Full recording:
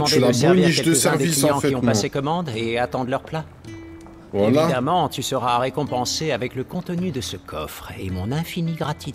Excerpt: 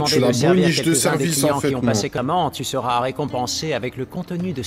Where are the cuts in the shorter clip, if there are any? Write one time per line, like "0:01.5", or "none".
0:02.2